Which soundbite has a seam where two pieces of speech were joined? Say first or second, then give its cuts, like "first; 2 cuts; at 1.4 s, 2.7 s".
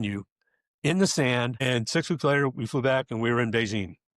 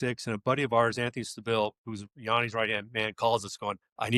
first; 1 cut; at 1.6 s